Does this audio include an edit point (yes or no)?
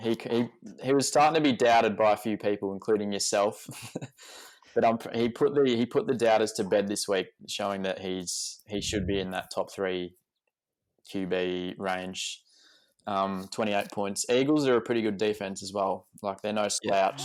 no